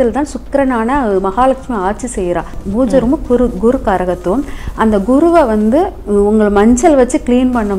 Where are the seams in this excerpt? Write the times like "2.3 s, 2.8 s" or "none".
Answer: 2.6 s

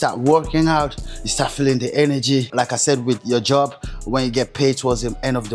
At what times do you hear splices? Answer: 2.5 s

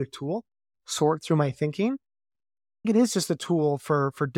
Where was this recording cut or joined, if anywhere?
2.9 s

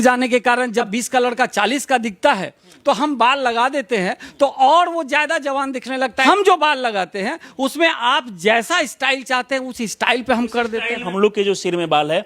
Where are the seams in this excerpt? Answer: 0.9 s, 6.2 s, 11.1 s

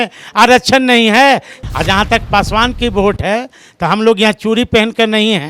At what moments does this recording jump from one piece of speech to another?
1.5 s

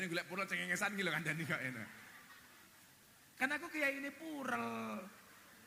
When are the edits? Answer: none

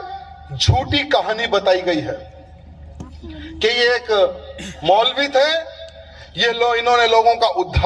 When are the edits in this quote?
none

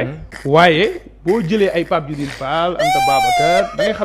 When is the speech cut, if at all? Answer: none

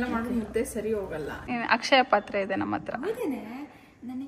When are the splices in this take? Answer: 1.5 s

